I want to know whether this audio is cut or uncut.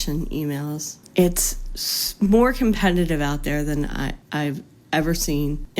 cut